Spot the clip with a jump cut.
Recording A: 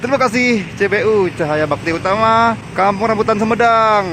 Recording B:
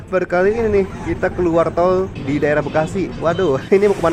A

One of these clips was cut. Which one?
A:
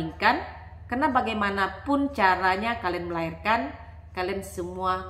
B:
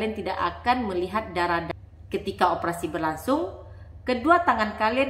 B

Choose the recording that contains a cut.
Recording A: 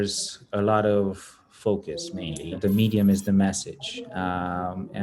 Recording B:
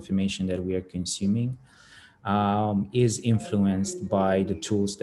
A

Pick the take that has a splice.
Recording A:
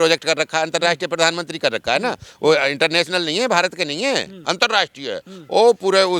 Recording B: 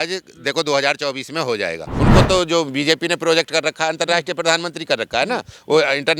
B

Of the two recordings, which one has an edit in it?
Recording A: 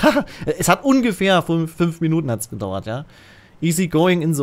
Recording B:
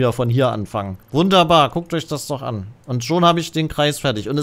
B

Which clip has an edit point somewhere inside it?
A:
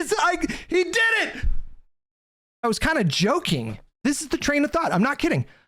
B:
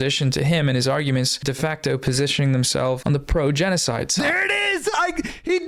A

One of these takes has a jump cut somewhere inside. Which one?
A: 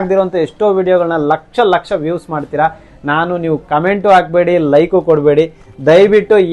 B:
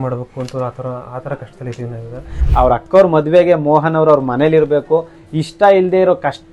B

